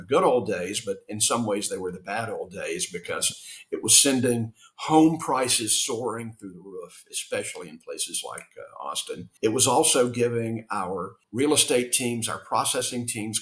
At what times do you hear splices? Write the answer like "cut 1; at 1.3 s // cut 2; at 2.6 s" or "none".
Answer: cut 1; at 9.2 s // cut 2; at 11.2 s